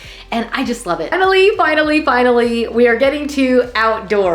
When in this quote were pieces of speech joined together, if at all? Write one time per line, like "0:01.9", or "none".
0:01.1